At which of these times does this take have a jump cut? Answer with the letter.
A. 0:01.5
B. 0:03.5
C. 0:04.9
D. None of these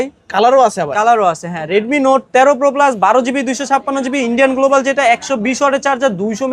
D